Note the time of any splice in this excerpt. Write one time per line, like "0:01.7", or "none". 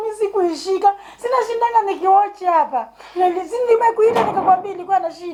none